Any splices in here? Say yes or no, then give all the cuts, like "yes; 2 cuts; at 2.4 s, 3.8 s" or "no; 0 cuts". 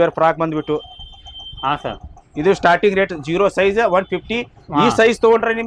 no; 0 cuts